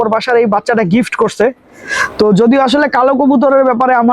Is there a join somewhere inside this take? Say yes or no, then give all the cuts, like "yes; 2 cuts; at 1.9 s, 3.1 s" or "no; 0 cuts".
no; 0 cuts